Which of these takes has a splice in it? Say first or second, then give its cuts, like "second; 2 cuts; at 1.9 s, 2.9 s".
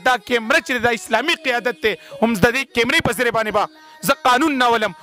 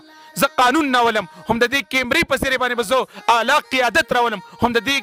first; 1 cut; at 2.7 s